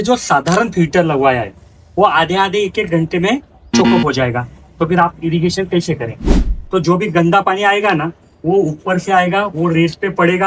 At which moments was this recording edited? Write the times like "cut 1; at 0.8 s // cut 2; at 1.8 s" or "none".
cut 1; at 6.5 s